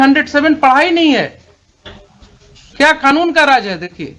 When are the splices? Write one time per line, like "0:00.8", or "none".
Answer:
0:02.6